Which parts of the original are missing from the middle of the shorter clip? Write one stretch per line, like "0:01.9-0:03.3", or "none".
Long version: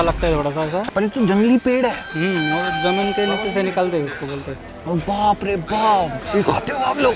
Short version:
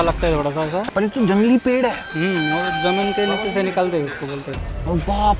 none